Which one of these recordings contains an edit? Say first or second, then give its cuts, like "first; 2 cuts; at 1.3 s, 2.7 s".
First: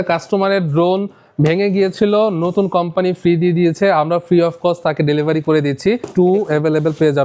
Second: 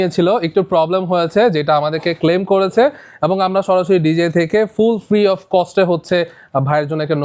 first; 1 cut; at 6.1 s